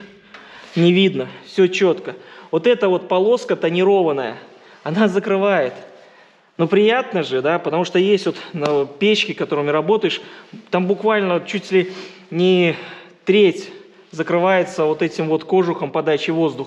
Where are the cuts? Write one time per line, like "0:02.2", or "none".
none

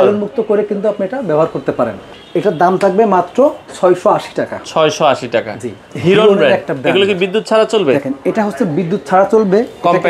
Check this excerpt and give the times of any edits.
0:02.0
0:03.7
0:05.9

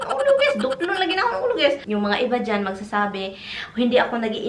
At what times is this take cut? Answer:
0:01.8

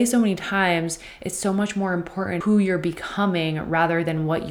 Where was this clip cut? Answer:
0:02.4

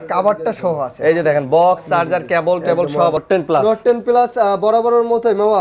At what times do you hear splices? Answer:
0:03.2

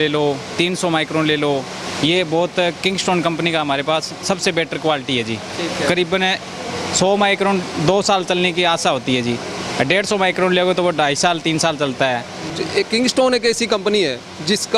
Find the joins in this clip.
0:12.5

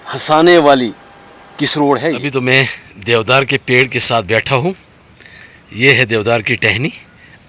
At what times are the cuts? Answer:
0:02.2

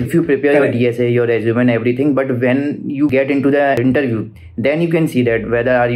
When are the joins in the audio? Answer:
none

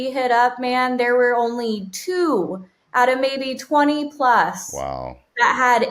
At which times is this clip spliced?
none

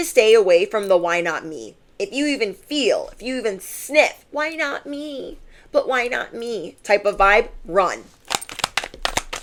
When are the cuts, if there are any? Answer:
none

